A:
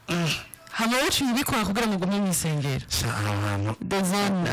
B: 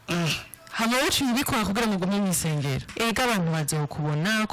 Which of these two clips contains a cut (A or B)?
B